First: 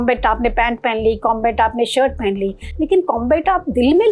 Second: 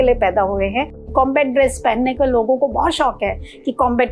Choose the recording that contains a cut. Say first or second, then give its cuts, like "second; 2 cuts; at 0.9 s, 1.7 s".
second; 1 cut; at 1.1 s